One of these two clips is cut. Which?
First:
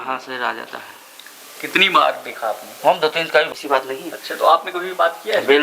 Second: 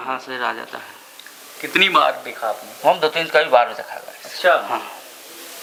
first; 1 cut; at 3.5 s

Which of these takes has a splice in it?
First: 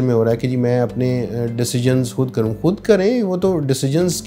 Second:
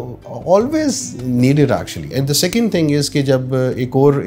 second; 1 cut; at 2.1 s

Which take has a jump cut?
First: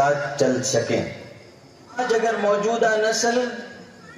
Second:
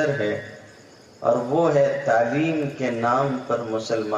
first; 1 cut; at 2.0 s

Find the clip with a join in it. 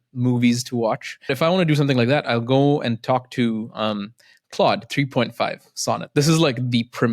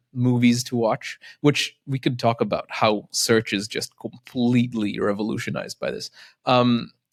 first; 1 cut; at 1.3 s

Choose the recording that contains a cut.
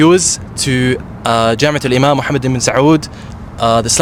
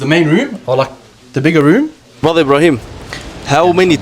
second; 1 cut; at 2.2 s

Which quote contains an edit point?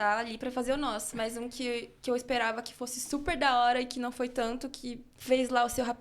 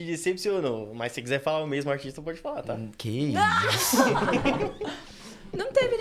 first; 1 cut; at 5.1 s

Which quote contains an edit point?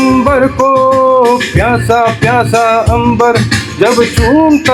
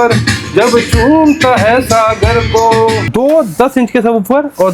second; 1 cut; at 3.1 s

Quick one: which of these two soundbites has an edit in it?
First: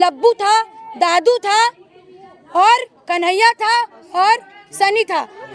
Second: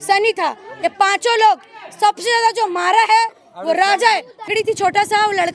second; 1 cut; at 4.5 s

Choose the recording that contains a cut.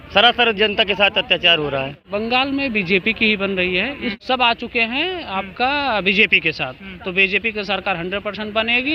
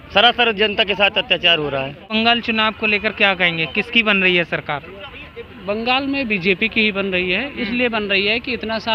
first; 2 cuts; at 2.0 s, 4.1 s

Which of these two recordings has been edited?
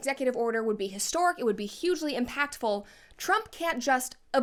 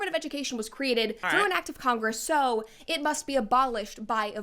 second; 2 cuts; at 1.2 s, 2.6 s

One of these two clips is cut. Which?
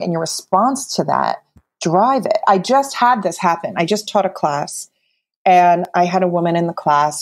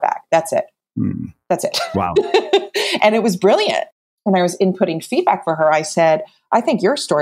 second; 1 cut; at 3.9 s

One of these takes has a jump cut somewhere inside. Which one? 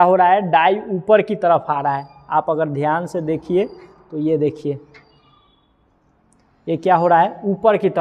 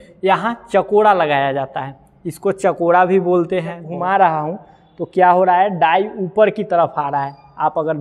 second; 1 cut; at 3.9 s

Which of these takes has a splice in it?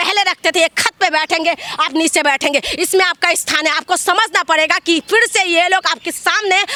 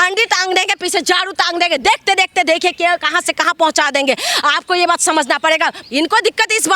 second; 1 cut; at 5.8 s

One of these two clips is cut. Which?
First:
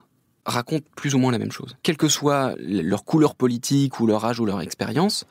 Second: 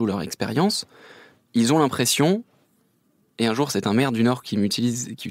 first; 1 cut; at 1.6 s

